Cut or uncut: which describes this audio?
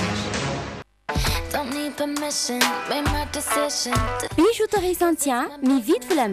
cut